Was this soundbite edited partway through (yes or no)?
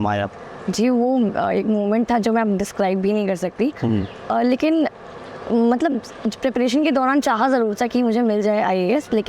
no